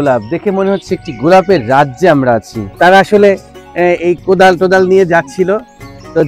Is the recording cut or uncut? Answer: cut